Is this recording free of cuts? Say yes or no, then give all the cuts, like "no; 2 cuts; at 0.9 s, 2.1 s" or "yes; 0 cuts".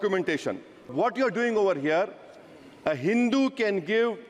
no; 1 cut; at 0.9 s